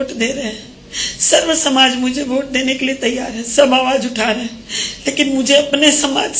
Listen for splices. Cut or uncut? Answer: uncut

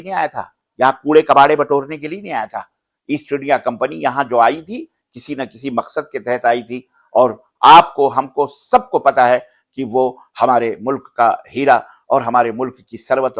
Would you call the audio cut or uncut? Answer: uncut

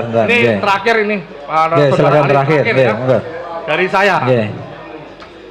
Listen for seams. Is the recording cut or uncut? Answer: uncut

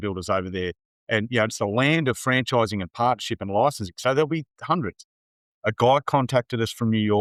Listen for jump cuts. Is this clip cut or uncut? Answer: uncut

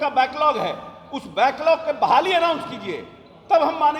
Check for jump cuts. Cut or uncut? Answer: uncut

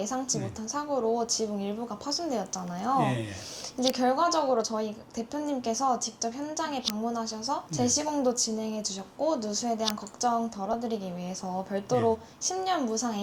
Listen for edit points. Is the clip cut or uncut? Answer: uncut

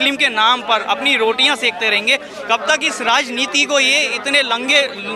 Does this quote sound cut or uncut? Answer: uncut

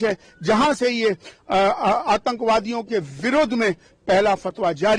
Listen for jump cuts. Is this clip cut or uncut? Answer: uncut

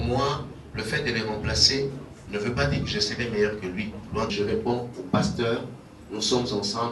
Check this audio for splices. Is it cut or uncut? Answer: cut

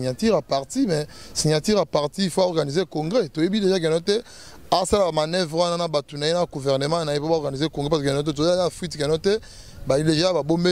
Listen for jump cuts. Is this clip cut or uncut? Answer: uncut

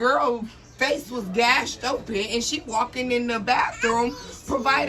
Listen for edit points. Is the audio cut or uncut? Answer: uncut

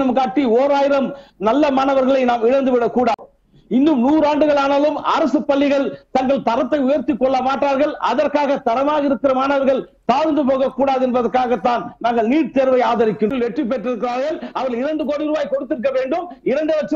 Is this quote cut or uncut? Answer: cut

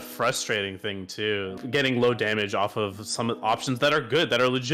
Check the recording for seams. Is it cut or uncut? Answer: cut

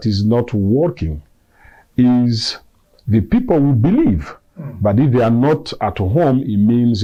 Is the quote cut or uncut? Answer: uncut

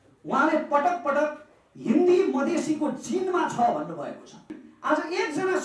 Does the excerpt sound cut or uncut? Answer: cut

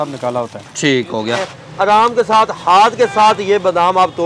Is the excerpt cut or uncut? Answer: cut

